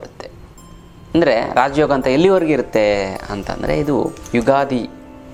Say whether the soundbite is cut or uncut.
uncut